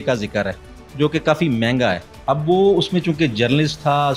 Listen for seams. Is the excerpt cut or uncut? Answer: cut